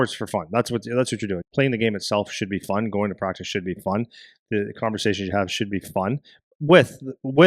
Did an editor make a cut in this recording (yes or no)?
yes